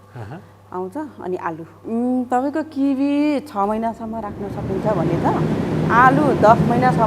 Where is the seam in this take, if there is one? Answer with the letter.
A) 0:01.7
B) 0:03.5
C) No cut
A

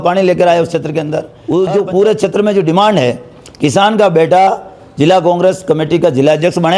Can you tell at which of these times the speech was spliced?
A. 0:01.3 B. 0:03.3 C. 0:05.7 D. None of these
A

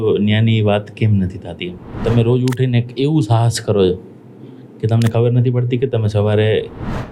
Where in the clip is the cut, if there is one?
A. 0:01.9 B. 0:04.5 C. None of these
A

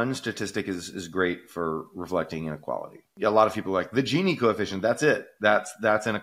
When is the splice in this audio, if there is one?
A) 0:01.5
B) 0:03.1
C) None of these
B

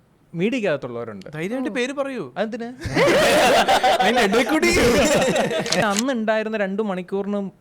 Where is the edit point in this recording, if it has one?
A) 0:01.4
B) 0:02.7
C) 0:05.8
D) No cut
C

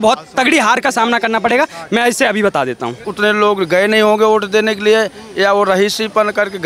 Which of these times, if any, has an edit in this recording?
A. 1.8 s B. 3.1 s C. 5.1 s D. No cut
B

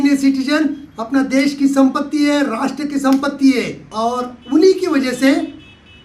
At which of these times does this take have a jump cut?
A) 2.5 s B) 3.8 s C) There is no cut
B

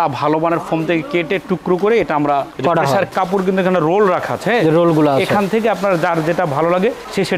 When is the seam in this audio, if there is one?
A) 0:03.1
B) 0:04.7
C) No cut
A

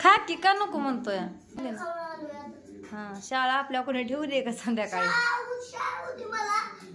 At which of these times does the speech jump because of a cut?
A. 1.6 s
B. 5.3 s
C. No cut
A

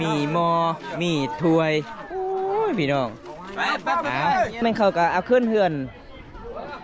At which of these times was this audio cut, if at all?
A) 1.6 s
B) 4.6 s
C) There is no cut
B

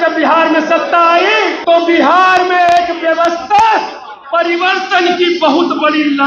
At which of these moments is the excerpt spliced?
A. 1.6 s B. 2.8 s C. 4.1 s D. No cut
A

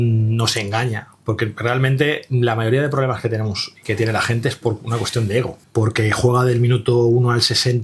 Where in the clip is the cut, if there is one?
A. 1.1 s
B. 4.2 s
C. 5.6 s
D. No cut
C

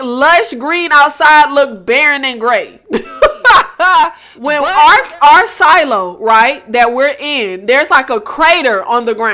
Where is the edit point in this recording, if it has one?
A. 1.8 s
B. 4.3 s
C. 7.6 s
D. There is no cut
B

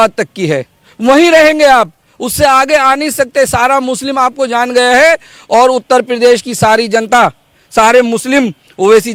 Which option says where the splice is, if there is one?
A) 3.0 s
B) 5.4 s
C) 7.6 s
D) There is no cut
D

